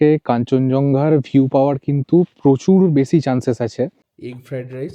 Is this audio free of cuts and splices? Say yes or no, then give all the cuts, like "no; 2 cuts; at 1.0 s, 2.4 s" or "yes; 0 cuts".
no; 1 cut; at 4.0 s